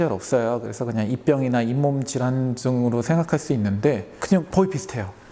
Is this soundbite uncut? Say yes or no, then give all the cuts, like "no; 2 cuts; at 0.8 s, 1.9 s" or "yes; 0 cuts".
yes; 0 cuts